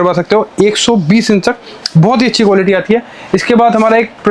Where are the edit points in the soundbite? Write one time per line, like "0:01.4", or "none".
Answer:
none